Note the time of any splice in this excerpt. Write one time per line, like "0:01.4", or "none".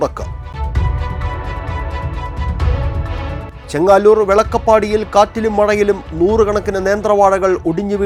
none